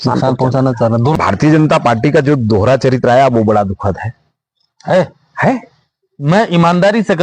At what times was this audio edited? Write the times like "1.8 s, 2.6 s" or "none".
1.2 s